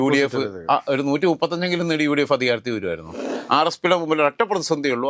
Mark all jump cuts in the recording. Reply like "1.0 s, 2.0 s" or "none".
3.3 s